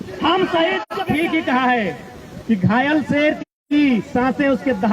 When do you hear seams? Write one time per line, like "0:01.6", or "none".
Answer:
0:00.9